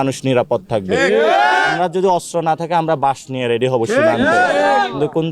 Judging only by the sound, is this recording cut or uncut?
cut